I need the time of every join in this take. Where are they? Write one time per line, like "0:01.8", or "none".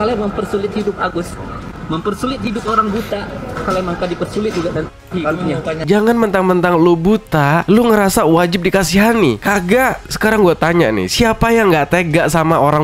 0:05.8